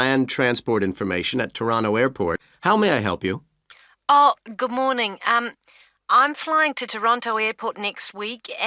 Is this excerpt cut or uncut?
cut